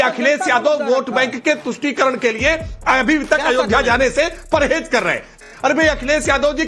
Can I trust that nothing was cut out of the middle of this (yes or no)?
no